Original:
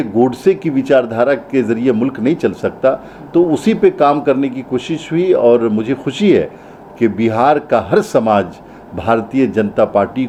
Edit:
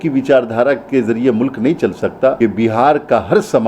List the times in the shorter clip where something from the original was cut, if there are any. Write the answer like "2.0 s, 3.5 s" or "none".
2.4 s

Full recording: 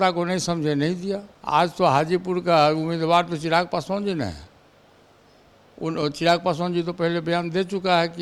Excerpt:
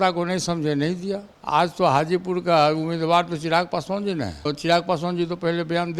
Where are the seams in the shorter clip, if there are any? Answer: 4.4 s

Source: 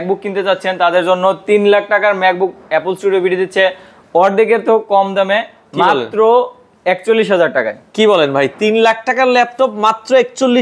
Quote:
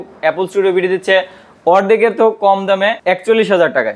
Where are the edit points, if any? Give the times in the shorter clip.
3.0 s

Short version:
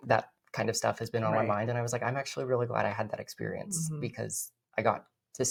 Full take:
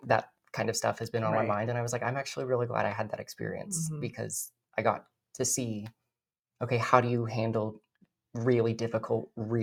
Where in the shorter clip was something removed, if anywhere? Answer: none

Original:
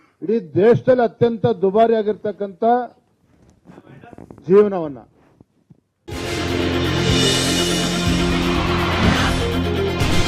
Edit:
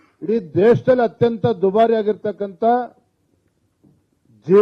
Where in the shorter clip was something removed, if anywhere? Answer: none

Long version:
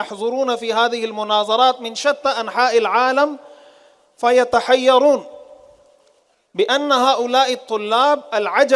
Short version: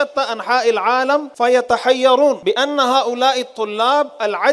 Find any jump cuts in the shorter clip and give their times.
1.3 s, 2.4 s

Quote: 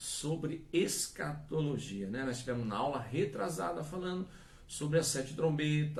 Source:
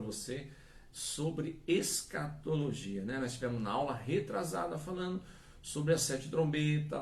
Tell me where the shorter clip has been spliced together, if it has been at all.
none

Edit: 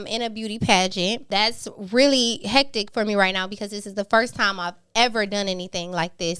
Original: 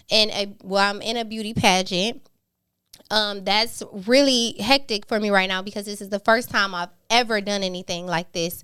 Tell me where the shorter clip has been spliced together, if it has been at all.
1.2 s

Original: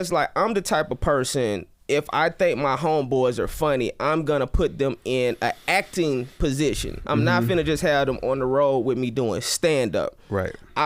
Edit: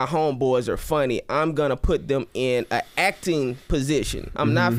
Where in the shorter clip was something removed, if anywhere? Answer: none

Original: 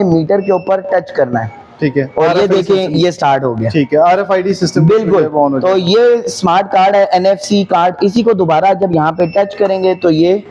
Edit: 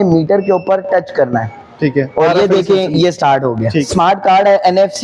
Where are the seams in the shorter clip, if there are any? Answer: 3.8 s

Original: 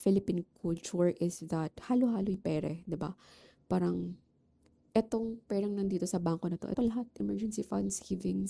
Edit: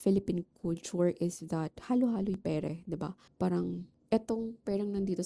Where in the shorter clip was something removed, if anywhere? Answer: 3.2 s, 3.9 s

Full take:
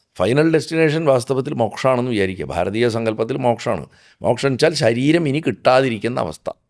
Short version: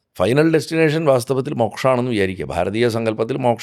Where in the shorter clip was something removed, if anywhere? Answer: none

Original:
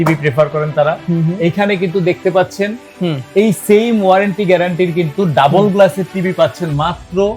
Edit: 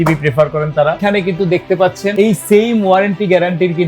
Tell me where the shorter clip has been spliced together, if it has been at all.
1.0 s, 2.1 s

